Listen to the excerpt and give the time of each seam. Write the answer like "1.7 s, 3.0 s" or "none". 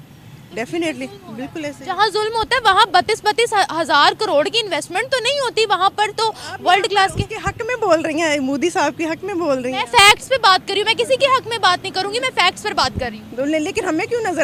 none